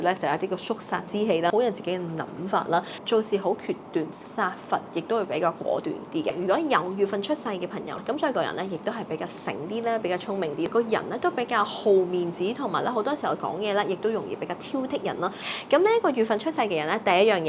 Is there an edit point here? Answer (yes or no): yes